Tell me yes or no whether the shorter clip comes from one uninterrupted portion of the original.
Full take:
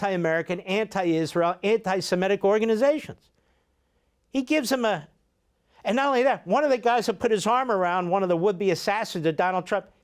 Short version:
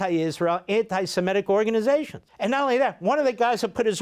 no